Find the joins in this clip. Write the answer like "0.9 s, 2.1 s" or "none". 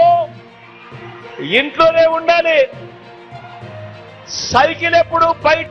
2.7 s, 4.4 s